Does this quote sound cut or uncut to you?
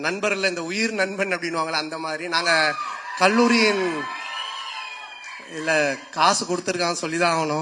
uncut